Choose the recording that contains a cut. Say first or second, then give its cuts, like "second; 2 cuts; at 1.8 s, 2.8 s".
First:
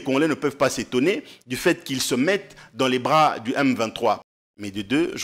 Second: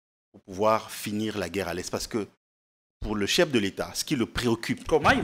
first; 1 cut; at 4.2 s